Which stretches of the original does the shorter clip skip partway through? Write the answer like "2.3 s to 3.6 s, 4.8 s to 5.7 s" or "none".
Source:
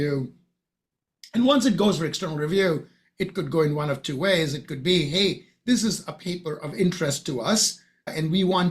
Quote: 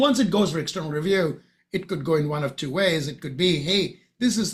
none